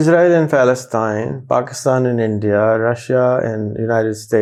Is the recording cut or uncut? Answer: uncut